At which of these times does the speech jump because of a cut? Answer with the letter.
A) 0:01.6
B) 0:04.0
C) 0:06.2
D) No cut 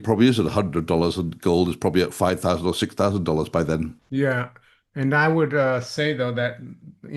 B